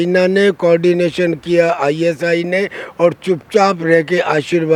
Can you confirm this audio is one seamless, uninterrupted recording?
yes; 0 cuts

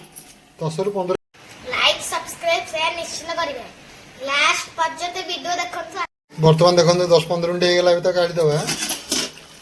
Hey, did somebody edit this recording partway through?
yes; 1 cut; at 1.1 s

